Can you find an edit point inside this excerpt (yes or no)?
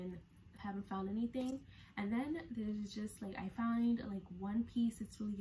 no